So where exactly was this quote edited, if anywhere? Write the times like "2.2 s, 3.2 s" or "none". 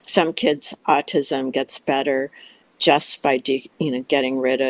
none